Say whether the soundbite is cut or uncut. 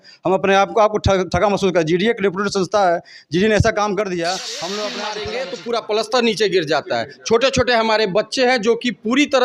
cut